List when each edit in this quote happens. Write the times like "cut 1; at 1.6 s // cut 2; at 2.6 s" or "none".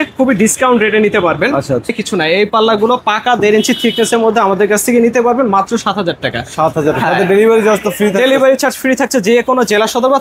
cut 1; at 1.9 s